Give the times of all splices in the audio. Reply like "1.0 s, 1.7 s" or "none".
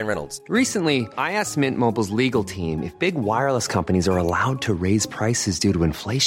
none

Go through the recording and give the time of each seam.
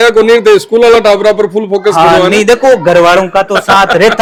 none

